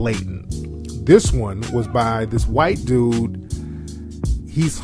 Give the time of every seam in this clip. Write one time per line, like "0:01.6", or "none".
0:01.3